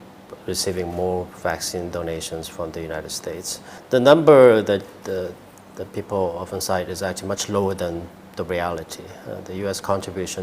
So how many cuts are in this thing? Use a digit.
1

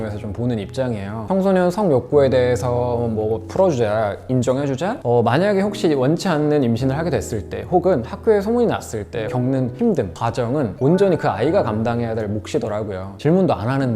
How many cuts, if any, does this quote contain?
4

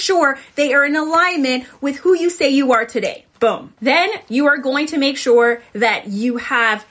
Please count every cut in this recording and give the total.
1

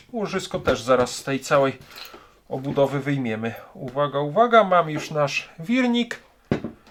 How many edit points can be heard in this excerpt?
0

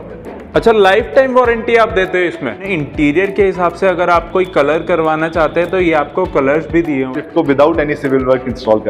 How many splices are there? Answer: 2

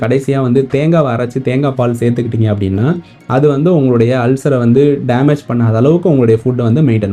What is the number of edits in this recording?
0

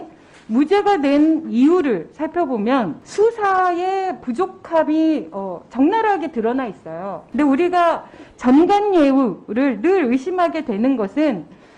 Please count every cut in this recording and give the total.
2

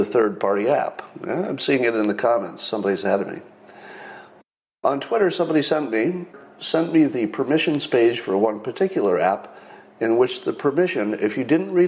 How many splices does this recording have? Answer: 1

